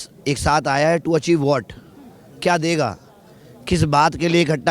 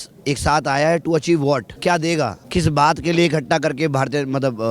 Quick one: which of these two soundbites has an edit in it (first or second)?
second